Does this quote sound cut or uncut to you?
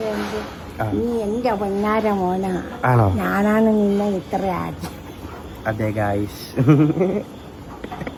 uncut